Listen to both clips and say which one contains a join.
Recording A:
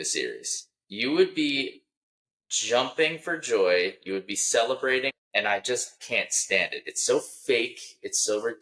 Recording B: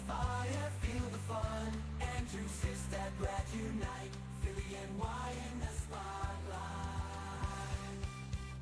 A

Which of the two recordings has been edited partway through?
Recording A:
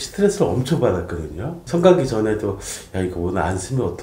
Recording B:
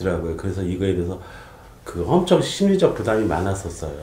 A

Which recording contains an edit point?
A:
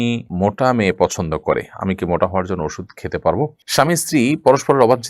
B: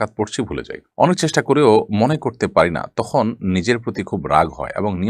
A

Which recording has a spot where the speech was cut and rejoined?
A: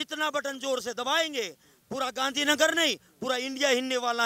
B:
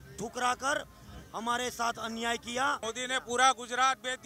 B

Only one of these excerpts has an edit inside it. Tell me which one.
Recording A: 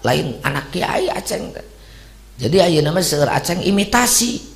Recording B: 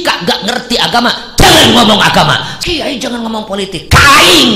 B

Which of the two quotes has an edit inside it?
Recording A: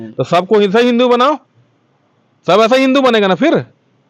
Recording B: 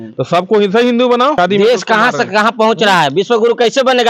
B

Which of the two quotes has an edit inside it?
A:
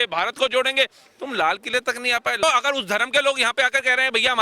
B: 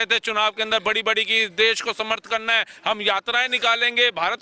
A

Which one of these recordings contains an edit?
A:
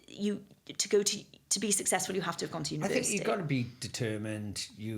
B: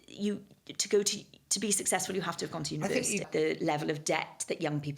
B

